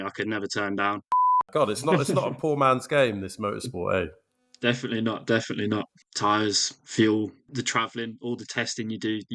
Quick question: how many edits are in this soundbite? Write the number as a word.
three